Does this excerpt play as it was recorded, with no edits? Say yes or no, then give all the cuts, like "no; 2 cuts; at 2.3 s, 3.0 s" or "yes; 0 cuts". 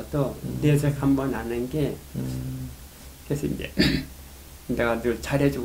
yes; 0 cuts